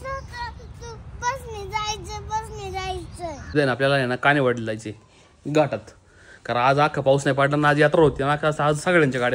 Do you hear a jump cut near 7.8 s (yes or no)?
no